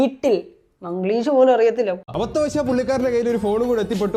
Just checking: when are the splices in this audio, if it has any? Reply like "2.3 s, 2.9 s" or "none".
2.1 s